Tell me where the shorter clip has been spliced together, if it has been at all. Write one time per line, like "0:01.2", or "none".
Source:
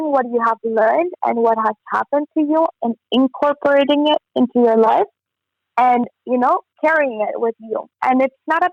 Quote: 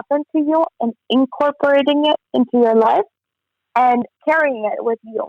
0:04.1